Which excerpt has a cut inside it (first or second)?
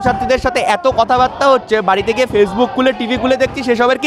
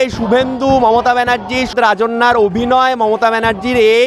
second